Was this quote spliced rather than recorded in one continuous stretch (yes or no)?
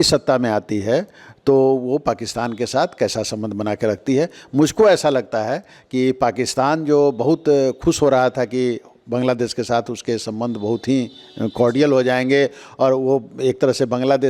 no